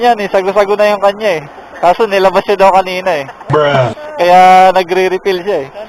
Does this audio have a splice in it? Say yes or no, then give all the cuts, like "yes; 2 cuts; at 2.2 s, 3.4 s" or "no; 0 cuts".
no; 0 cuts